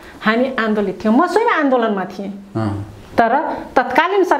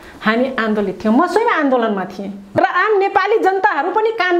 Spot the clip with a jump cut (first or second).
second